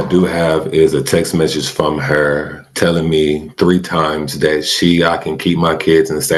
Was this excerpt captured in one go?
yes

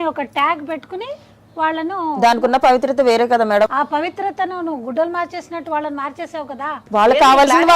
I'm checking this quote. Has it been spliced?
yes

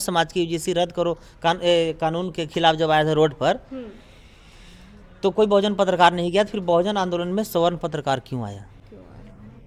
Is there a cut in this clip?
no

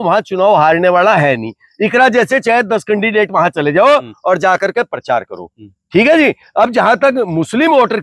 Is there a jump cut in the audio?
no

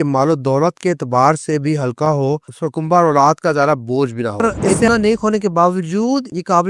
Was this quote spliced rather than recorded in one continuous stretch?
yes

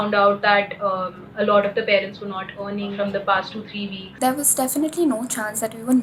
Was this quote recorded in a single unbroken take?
no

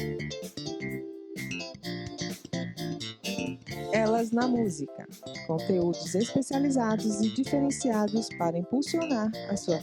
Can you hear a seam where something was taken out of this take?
yes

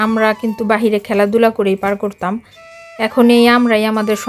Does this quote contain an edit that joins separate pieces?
no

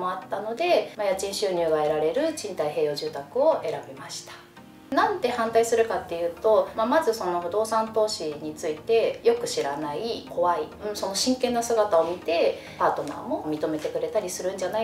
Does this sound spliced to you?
yes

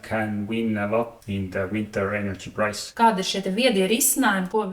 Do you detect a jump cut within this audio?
yes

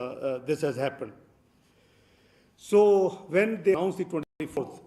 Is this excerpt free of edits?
yes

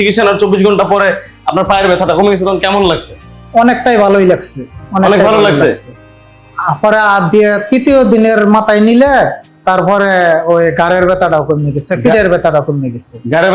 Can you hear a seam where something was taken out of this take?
no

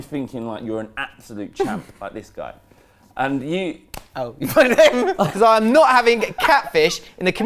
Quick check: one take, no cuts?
no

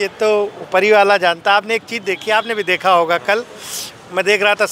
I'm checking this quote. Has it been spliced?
no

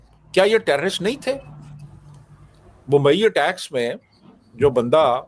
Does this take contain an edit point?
no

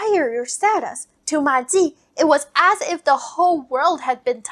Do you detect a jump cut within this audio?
no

